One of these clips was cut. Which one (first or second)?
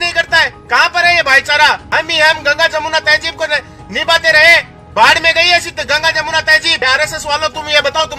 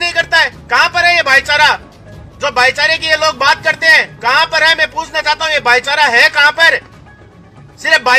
first